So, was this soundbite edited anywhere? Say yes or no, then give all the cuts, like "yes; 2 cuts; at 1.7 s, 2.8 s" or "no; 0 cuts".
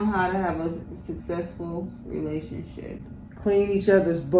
no; 0 cuts